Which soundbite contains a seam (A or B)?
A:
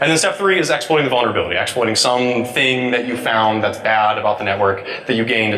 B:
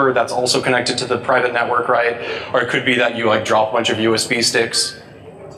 A